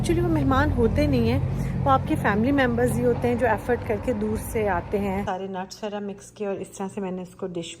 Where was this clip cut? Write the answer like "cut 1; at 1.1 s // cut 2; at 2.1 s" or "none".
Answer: cut 1; at 5.2 s